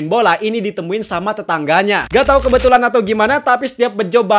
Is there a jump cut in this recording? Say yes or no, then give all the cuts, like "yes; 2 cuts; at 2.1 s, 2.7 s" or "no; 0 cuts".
yes; 1 cut; at 2.0 s